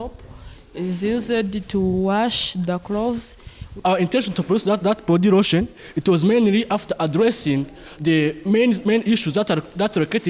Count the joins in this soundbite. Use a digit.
1